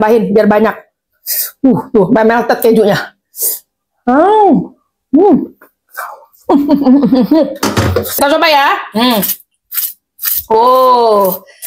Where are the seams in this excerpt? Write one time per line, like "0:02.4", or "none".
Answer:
0:08.1